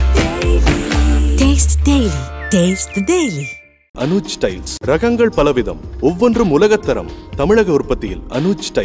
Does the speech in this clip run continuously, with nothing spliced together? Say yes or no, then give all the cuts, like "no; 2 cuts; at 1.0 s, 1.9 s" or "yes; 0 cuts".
yes; 0 cuts